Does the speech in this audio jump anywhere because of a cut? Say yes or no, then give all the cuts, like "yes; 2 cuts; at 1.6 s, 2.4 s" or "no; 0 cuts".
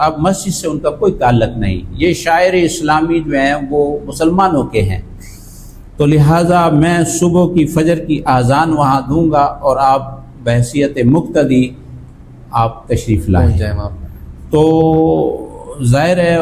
no; 0 cuts